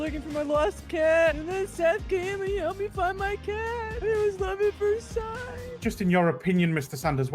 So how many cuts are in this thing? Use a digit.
1